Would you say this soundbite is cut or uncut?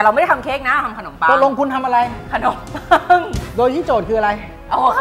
cut